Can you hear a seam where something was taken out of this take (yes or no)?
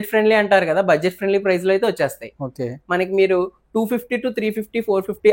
no